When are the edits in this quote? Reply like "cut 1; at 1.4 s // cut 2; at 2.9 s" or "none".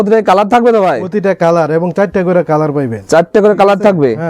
none